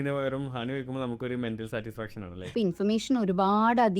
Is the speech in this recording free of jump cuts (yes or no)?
no